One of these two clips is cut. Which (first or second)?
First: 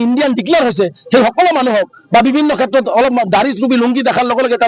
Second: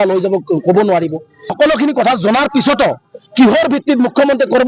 second